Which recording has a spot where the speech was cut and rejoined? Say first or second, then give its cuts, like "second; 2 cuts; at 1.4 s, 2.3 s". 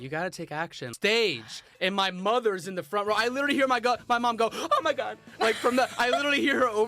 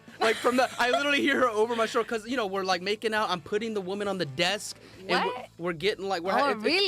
first; 1 cut; at 0.9 s